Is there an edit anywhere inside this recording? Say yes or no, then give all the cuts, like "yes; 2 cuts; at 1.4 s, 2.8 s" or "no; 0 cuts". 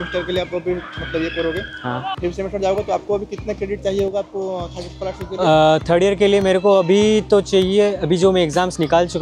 no; 0 cuts